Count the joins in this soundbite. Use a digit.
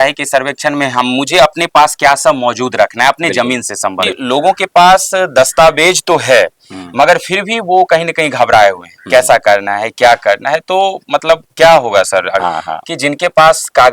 2